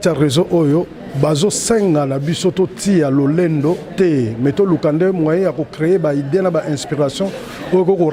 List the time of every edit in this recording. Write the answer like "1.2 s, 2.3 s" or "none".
none